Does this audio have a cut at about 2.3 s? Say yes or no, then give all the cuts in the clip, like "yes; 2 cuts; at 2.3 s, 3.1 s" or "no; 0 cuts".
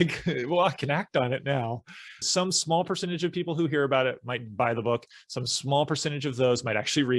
yes; 1 cut; at 2.3 s